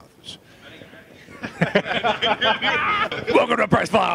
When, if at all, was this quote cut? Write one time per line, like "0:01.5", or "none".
0:03.1